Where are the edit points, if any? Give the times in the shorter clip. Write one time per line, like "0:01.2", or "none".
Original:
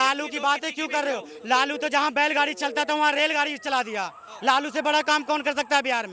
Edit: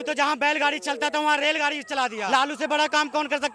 0:02.3